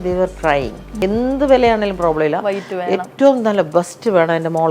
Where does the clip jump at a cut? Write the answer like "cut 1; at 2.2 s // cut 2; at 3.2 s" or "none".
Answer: cut 1; at 1.0 s